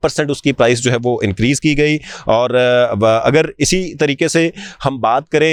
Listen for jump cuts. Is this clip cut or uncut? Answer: uncut